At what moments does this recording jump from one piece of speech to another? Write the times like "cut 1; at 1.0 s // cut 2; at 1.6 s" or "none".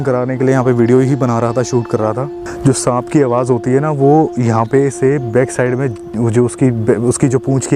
cut 1; at 2.4 s